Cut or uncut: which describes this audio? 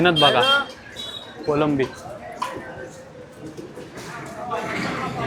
uncut